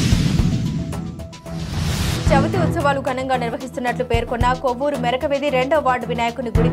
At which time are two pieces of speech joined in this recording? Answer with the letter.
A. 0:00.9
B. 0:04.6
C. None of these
A